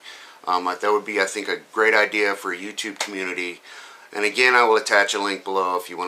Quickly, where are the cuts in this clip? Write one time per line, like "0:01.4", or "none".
0:01.1